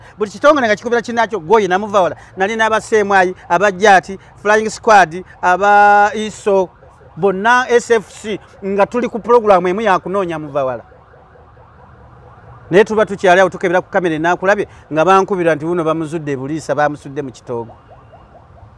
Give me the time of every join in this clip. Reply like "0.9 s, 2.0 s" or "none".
none